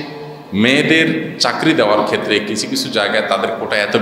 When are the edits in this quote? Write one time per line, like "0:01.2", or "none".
none

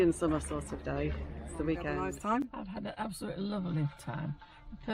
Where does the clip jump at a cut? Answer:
0:02.0

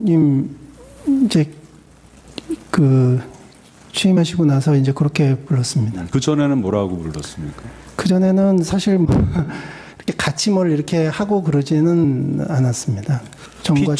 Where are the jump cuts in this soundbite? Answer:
none

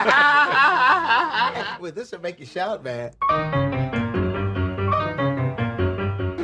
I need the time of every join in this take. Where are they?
0:01.6

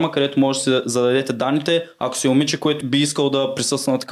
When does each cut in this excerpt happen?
0:02.8

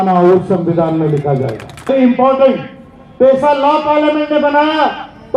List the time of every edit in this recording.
0:01.9

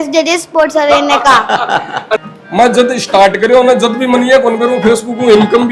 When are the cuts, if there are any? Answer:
0:02.2

